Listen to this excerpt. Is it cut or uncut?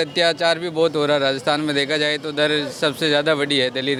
uncut